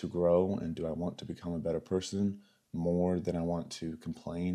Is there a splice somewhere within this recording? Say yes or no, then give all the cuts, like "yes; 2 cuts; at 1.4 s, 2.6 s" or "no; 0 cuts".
no; 0 cuts